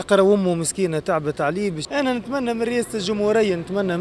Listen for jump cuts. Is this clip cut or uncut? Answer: cut